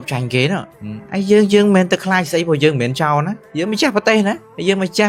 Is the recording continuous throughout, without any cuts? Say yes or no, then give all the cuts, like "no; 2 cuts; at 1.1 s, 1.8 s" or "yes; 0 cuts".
yes; 0 cuts